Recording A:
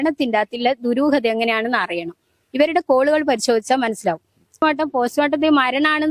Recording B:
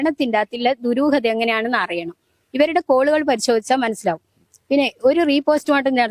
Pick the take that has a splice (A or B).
A